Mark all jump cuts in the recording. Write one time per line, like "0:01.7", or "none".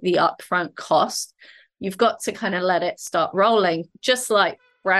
0:01.7